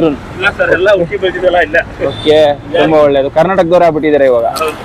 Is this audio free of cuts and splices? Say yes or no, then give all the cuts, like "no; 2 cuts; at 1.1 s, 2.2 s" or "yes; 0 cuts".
yes; 0 cuts